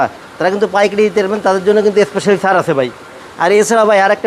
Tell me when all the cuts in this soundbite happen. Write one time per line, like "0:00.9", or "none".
none